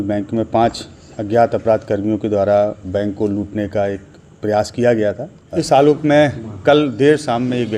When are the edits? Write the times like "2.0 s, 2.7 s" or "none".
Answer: 5.5 s